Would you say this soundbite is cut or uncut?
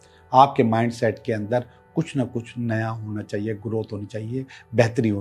uncut